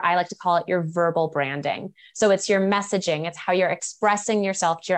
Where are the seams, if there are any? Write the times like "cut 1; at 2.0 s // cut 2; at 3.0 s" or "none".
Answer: none